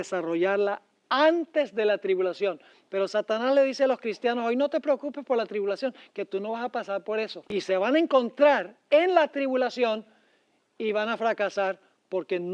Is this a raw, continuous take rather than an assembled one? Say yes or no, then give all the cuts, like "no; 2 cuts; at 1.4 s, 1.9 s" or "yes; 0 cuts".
no; 1 cut; at 7.4 s